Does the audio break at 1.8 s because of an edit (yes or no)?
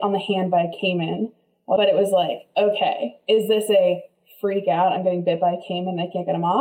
yes